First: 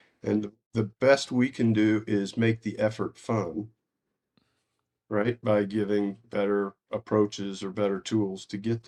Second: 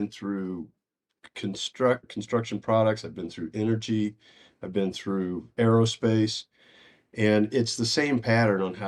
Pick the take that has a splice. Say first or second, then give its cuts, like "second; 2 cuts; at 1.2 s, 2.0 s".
second; 2 cuts; at 2.0 s, 5.5 s